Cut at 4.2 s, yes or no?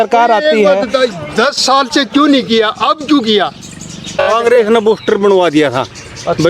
yes